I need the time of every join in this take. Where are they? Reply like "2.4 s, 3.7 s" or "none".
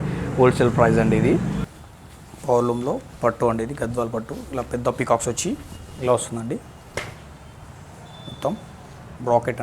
1.7 s